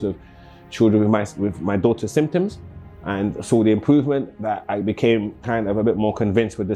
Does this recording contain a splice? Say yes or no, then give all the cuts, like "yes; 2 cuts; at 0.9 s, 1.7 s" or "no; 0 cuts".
no; 0 cuts